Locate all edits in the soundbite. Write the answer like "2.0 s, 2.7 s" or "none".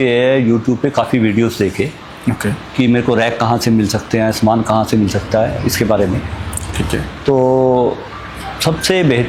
none